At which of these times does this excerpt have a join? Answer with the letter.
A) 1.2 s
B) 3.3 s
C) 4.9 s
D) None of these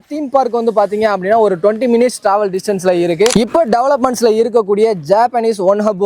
B